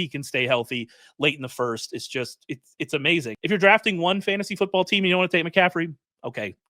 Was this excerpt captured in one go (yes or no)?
no